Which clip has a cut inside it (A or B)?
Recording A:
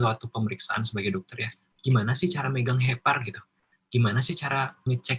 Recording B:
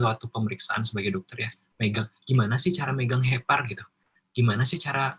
A